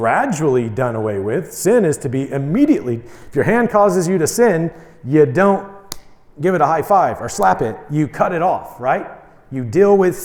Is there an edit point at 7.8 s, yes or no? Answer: no